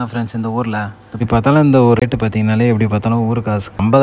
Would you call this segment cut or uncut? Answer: cut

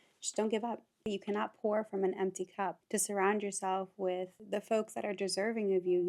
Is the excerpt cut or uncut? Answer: cut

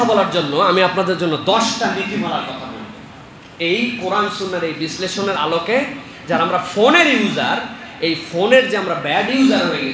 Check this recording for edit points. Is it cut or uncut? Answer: uncut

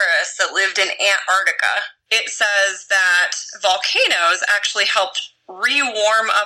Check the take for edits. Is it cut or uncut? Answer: cut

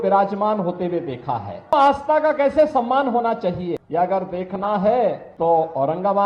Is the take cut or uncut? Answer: cut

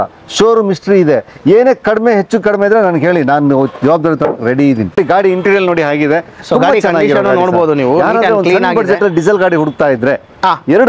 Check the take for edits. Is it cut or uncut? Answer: cut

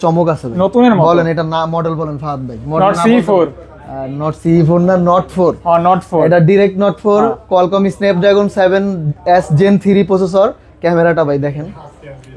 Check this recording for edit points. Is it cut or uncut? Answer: uncut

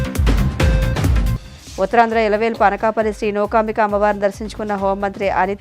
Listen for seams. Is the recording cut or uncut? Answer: cut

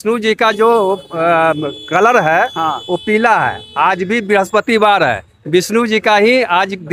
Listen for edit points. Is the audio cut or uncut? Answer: uncut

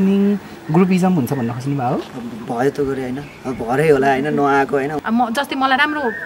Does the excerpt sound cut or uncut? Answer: cut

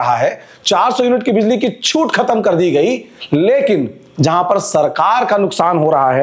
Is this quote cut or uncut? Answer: uncut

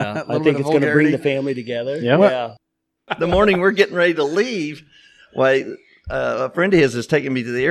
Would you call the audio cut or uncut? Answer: cut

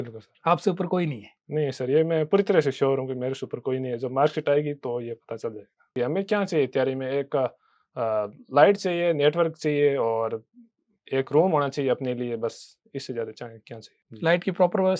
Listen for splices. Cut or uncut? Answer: cut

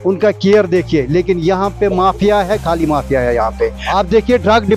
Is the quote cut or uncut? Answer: uncut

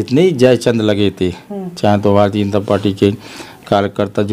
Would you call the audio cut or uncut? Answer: uncut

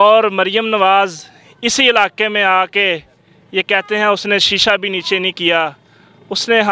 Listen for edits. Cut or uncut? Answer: uncut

